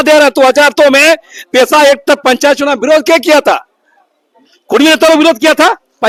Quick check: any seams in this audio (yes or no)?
no